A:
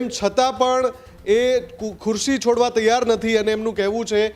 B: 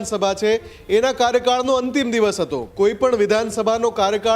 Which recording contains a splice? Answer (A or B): B